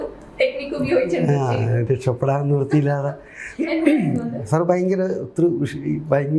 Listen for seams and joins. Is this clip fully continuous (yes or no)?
yes